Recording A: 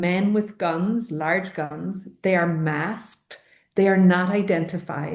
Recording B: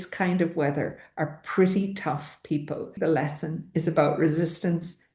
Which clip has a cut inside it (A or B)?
B